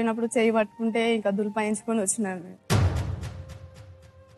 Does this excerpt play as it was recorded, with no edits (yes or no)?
no